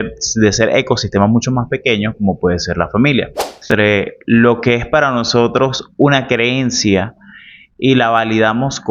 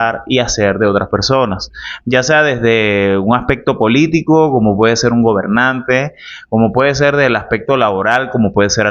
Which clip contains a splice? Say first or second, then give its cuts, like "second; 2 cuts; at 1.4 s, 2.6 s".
first; 1 cut; at 3.7 s